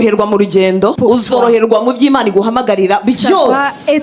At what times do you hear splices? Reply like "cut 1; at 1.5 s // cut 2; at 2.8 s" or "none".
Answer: cut 1; at 1.0 s

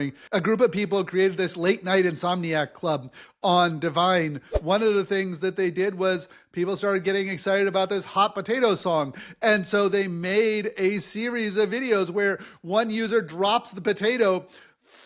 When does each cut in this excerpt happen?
cut 1; at 4.5 s

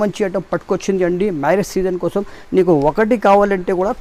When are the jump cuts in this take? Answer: none

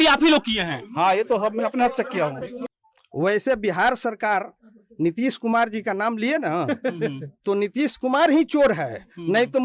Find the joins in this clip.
cut 1; at 2.6 s

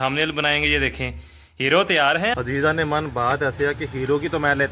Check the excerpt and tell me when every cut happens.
cut 1; at 2.3 s

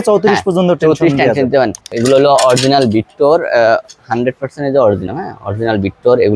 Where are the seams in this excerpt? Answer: cut 1; at 1.9 s

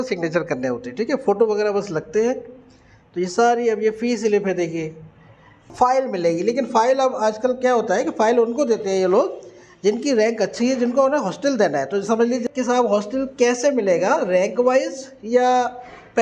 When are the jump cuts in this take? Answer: cut 1; at 5.7 s // cut 2; at 12.4 s

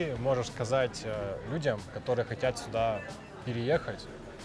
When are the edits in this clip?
none

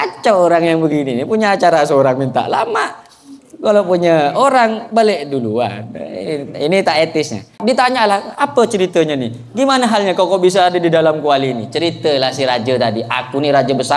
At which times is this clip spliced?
cut 1; at 7.5 s

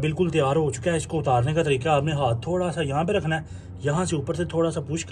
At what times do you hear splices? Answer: none

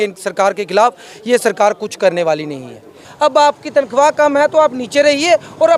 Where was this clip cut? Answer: cut 1; at 3.0 s

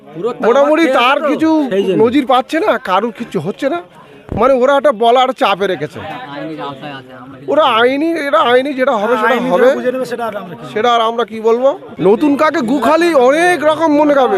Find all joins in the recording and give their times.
cut 1; at 11.9 s

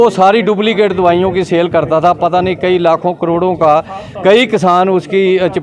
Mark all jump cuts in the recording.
none

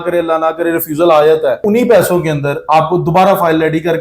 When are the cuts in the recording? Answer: cut 1; at 1.6 s

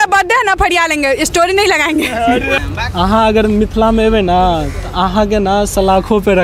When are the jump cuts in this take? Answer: cut 1; at 2.6 s

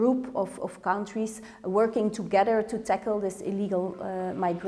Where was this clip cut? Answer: none

